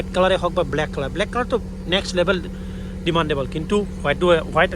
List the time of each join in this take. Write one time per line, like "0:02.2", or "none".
none